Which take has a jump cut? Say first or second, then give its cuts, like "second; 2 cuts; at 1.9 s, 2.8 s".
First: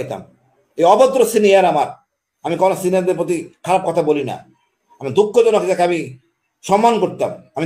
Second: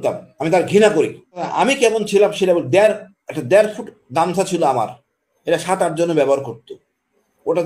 second; 1 cut; at 1.5 s